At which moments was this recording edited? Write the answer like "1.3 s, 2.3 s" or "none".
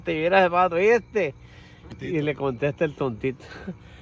2.0 s